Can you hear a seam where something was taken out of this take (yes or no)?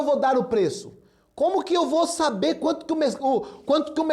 no